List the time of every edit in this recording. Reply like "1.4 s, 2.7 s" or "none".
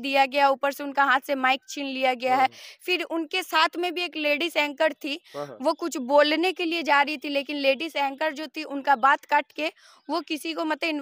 none